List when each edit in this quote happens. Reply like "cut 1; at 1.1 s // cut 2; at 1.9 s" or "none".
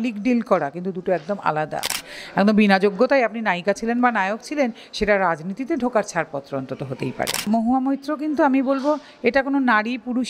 cut 1; at 2.0 s // cut 2; at 7.5 s